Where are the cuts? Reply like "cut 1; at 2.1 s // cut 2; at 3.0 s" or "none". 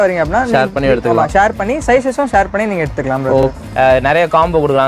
cut 1; at 3.5 s

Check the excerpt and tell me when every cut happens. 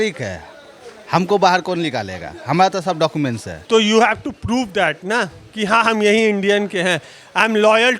cut 1; at 3.5 s

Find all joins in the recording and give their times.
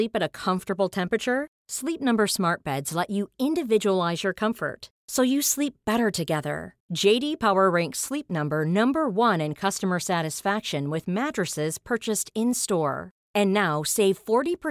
none

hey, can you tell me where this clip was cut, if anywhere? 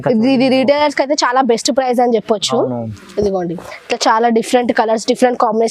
cut 1; at 3.7 s

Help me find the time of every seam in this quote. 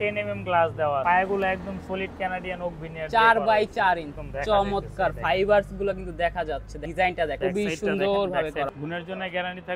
cut 1; at 1.0 s // cut 2; at 4.2 s // cut 3; at 6.8 s // cut 4; at 7.4 s // cut 5; at 8.7 s

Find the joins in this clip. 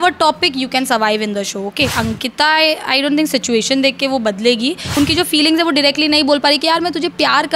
cut 1; at 1.9 s // cut 2; at 4.9 s

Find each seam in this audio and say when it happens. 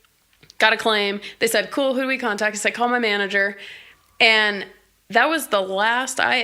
none

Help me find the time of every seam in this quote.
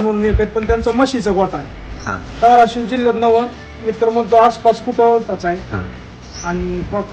cut 1; at 5.3 s

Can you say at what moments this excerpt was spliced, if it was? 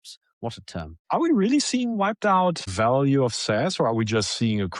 cut 1; at 1.0 s // cut 2; at 2.7 s

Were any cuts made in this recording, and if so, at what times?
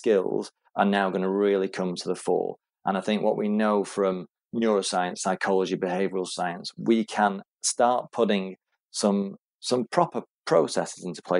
cut 1; at 4.4 s

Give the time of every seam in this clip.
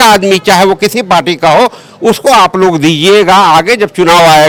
none

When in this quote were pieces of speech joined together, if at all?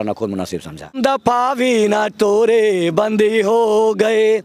cut 1; at 1.0 s

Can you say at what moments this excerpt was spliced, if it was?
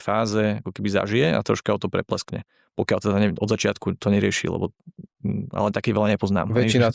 none

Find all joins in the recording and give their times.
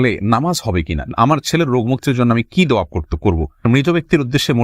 cut 1; at 1.1 s // cut 2; at 3.6 s

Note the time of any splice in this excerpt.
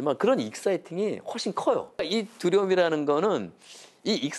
cut 1; at 2.0 s

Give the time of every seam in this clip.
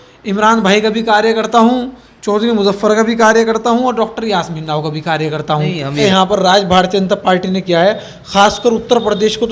cut 1; at 6.0 s

